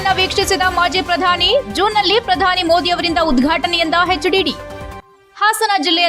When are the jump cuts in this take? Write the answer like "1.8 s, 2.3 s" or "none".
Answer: none